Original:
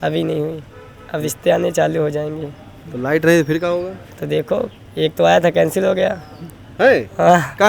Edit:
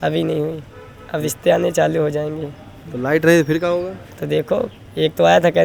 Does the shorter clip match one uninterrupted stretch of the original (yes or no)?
yes